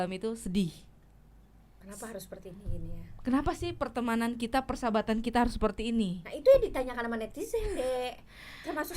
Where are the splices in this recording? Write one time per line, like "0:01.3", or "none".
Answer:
none